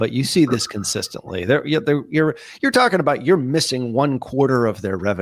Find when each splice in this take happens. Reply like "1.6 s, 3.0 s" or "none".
none